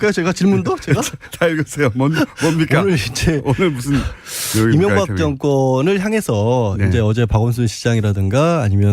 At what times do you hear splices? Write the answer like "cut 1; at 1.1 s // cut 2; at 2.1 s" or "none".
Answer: cut 1; at 2.3 s